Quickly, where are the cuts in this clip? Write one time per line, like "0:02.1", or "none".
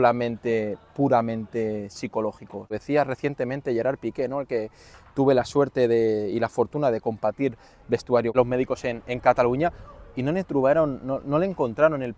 0:02.8
0:08.4